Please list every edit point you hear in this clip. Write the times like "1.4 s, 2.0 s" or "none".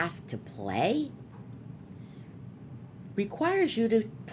none